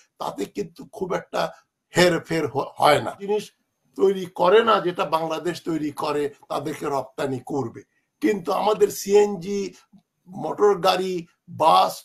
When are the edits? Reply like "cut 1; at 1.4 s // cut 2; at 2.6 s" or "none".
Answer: cut 1; at 3.2 s